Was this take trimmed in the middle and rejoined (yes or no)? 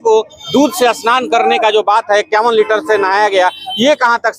no